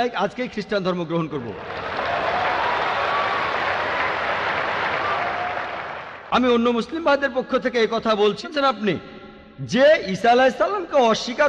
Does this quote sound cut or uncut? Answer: cut